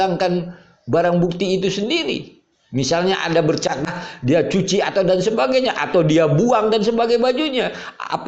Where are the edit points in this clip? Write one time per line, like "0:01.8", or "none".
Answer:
0:03.8